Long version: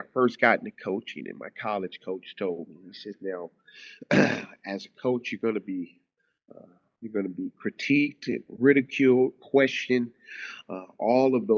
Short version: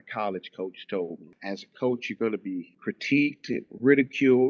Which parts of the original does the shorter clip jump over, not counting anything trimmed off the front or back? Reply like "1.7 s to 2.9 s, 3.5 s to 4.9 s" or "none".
2.8 s to 4.5 s, 6.0 s to 7.5 s